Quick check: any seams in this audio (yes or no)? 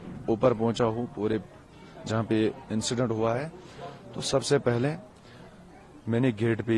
no